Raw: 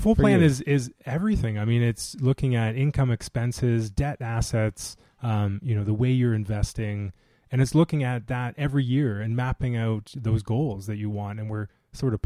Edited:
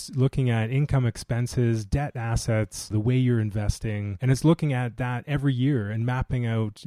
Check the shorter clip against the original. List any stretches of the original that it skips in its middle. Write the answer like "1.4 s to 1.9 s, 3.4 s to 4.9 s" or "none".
4.9 s to 5.8 s, 7.0 s to 7.4 s